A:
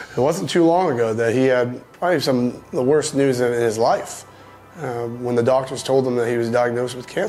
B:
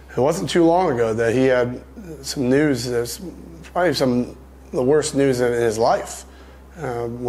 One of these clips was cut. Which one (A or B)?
A